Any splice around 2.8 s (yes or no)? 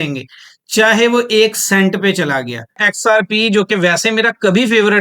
yes